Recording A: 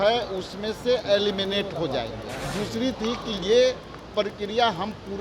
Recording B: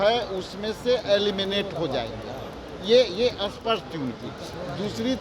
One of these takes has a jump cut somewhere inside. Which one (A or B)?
A